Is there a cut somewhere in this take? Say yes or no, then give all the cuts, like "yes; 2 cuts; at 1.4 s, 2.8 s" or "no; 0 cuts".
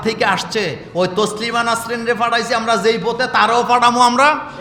no; 0 cuts